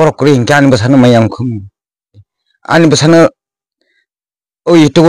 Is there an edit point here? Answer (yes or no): yes